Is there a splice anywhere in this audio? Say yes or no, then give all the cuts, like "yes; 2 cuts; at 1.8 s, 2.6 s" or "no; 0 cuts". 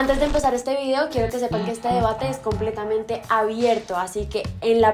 no; 0 cuts